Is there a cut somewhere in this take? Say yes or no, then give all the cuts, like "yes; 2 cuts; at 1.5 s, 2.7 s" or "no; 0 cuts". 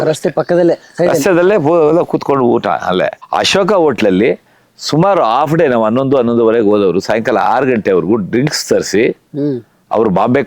yes; 1 cut; at 3.2 s